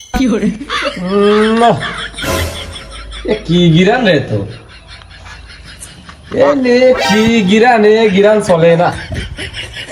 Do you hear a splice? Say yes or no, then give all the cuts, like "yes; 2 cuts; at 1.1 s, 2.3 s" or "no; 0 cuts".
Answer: no; 0 cuts